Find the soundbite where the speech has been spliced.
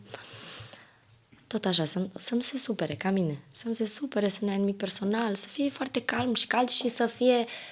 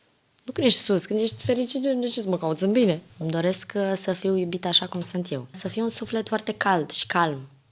second; 2 cuts; at 3.1 s, 5.6 s

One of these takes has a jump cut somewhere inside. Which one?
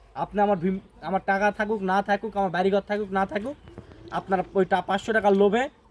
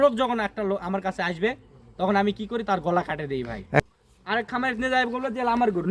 second; 1 cut; at 3.8 s

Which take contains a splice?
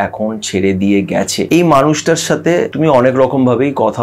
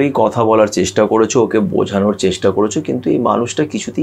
first; 2 cuts; at 1.5 s, 2.7 s

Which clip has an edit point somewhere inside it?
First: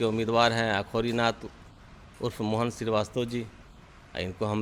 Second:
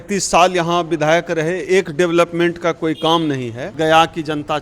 second; 1 cut; at 3.7 s

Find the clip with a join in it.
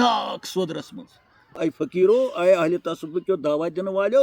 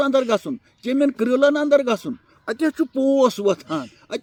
first; 1 cut; at 1.5 s

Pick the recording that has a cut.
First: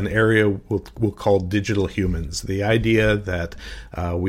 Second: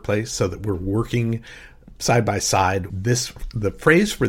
second; 1 cut; at 2.9 s

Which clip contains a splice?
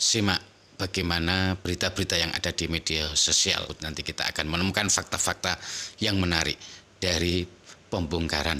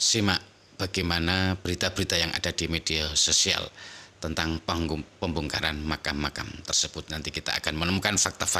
first; 1 cut; at 3.7 s

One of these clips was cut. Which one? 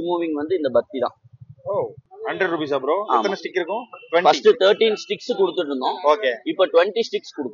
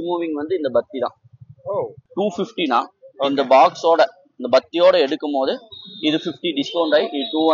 second; 1 cut; at 2.1 s

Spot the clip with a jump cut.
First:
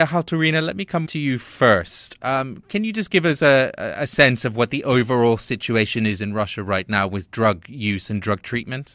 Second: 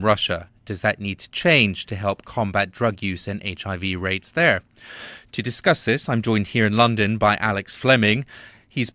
first; 1 cut; at 4.8 s

